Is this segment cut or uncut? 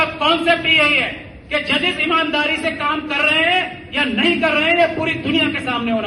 uncut